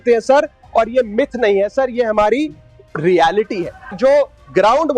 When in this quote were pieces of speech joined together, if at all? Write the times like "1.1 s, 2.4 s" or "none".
3.9 s